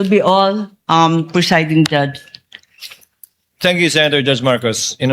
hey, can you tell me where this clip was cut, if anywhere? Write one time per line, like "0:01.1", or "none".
none